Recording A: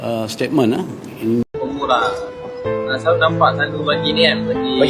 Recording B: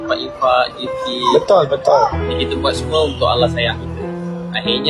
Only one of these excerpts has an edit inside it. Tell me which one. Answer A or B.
A